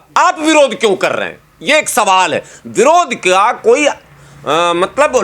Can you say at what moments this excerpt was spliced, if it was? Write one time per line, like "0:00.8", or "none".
none